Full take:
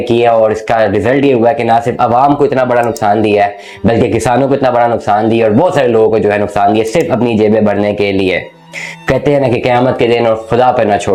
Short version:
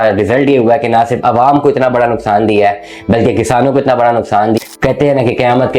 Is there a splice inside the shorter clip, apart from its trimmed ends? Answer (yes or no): yes